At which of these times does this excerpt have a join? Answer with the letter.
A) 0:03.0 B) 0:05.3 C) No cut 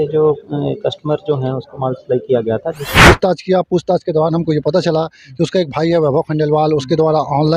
A